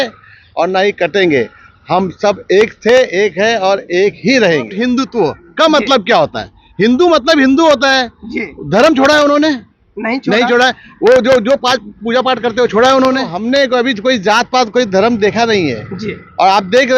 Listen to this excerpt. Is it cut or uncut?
cut